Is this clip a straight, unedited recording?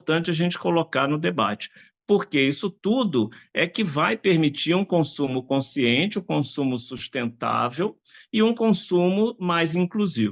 yes; 0 cuts

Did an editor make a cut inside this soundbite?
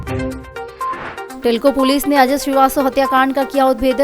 yes; 1 cut; at 0.9 s

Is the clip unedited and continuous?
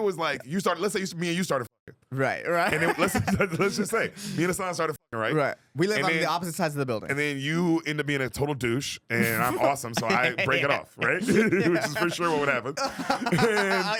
yes; 0 cuts

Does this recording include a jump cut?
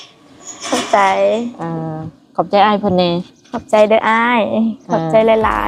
no; 0 cuts

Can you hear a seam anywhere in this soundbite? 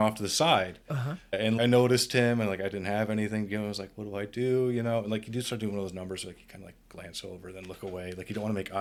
no; 0 cuts

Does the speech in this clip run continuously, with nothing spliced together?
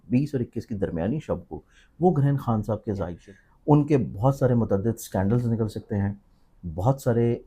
no; 1 cut; at 3.2 s

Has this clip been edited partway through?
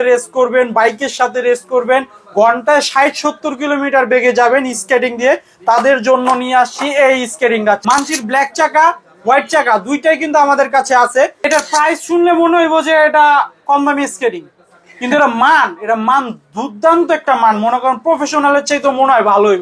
yes; 2 cuts; at 7.8 s, 11.5 s

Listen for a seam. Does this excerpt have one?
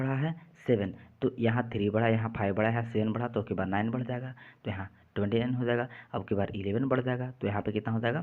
no; 0 cuts

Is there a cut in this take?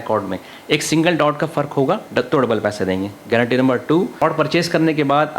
yes; 1 cut; at 4.2 s

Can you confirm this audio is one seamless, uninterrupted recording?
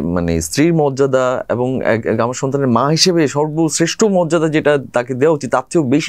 yes; 0 cuts

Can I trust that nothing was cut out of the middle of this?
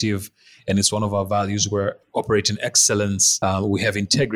no; 1 cut; at 3.3 s

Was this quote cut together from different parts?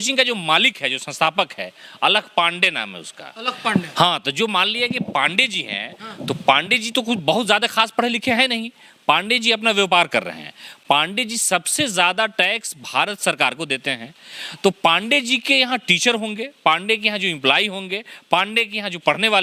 no; 0 cuts

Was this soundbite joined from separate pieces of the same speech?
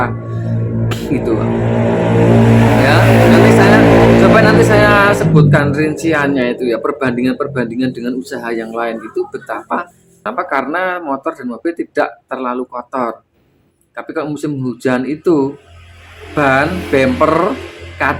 yes; 1 cut; at 10.0 s

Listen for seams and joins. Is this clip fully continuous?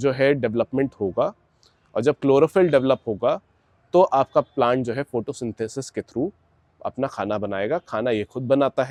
yes; 0 cuts

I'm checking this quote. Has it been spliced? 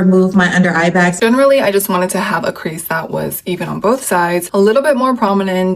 yes; 2 cuts; at 1.1 s, 4.5 s

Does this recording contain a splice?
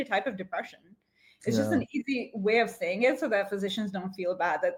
no; 0 cuts

